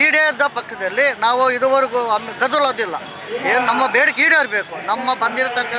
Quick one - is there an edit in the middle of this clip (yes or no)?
no